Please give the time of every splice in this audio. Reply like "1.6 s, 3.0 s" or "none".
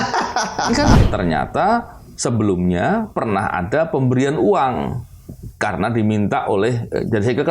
1.0 s